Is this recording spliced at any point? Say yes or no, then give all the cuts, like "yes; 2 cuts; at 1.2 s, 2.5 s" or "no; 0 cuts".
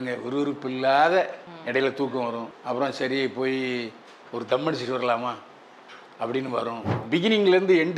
yes; 3 cuts; at 1.5 s, 2.5 s, 7.0 s